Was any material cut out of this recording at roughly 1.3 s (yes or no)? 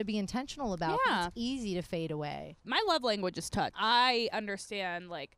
no